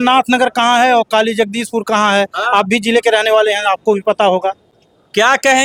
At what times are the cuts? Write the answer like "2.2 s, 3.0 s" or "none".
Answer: none